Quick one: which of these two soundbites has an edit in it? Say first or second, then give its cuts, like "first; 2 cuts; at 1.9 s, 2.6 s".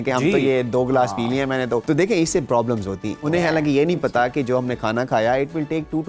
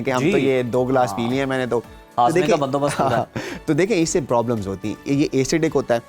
first; 2 cuts; at 1.8 s, 3.2 s